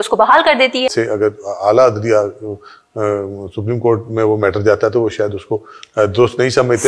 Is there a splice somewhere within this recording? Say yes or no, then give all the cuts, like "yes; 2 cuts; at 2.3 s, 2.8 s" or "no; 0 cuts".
yes; 1 cut; at 0.9 s